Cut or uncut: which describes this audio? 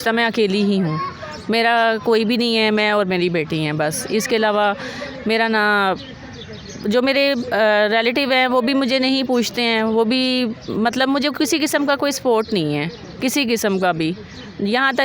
uncut